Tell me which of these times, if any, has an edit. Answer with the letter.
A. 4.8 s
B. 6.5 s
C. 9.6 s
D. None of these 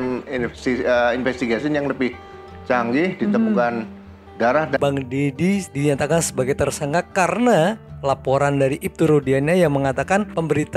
A